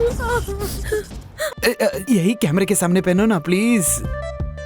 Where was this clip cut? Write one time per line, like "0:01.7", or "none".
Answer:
0:01.5

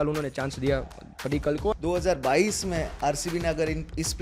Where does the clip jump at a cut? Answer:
0:01.7

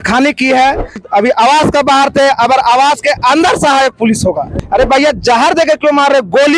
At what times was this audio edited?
0:01.0
0:04.5

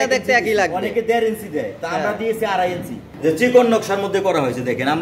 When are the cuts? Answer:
0:03.0

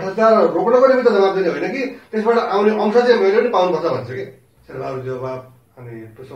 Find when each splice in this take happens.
0:04.6

